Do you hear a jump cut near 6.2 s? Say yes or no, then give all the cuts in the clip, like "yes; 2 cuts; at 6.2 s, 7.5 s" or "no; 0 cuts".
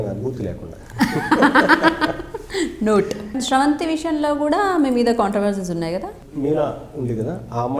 yes; 2 cuts; at 3.4 s, 6.2 s